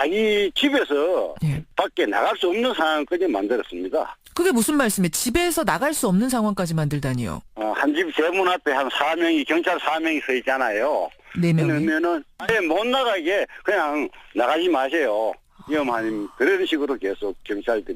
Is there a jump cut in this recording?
yes; 1 cut; at 10.0 s

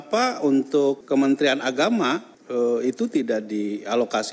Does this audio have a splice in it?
yes; 2 cuts; at 1.0 s, 2.3 s

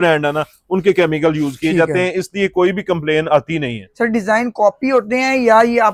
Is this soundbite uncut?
yes; 0 cuts

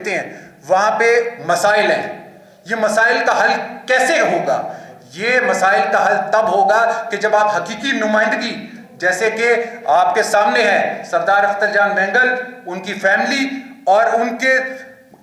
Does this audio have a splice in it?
no; 0 cuts

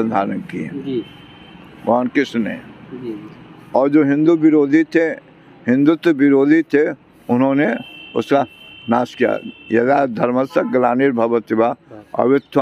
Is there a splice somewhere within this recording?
no; 0 cuts

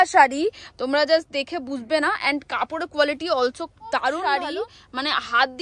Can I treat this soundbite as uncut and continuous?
no; 1 cut; at 4.2 s

